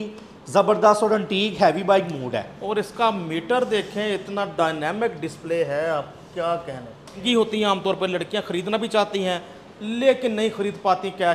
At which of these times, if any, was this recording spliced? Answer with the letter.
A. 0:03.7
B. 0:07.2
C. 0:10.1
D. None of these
B